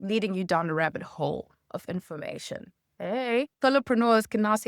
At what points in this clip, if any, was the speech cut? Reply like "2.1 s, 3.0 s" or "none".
2.8 s